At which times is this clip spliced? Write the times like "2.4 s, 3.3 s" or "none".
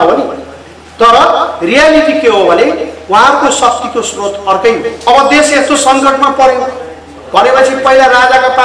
4.9 s